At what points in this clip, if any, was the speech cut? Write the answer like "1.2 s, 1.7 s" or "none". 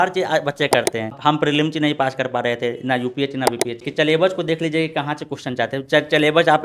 1.1 s, 3.9 s